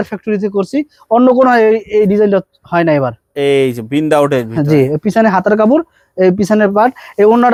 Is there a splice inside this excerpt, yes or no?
no